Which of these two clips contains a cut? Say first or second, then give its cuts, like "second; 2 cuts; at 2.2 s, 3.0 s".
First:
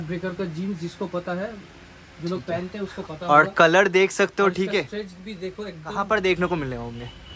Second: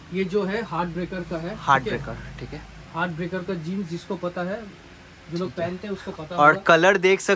first; 1 cut; at 6.0 s